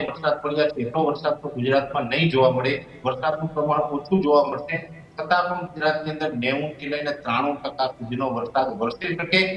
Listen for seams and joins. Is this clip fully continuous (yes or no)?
yes